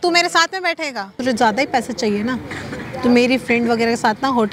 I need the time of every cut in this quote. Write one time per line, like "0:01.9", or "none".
0:01.2